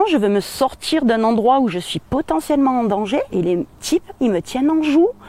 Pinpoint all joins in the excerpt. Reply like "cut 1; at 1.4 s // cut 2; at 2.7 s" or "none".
cut 1; at 3.3 s